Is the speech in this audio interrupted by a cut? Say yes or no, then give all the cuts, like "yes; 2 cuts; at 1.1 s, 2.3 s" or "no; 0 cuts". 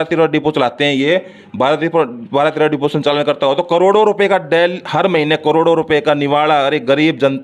no; 0 cuts